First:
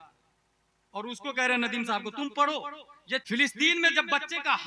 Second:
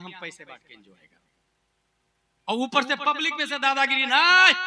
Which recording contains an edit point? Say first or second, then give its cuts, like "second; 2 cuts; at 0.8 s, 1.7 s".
first; 1 cut; at 3.2 s